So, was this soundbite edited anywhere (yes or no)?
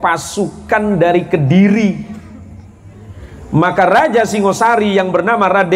no